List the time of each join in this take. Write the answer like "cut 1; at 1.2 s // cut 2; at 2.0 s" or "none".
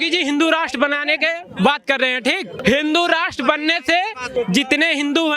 cut 1; at 2.5 s // cut 2; at 4.2 s